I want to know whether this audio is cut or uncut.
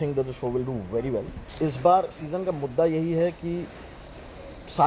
cut